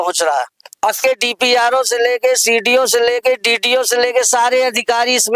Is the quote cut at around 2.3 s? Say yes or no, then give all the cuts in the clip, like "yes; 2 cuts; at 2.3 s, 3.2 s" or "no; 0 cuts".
no; 1 cut; at 1.0 s